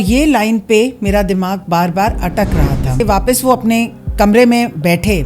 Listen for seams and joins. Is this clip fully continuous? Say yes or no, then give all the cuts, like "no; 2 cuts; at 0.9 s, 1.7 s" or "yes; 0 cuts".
no; 1 cut; at 3.0 s